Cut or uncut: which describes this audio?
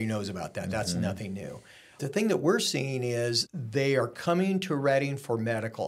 cut